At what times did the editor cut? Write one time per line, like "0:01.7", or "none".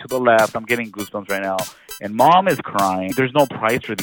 0:03.1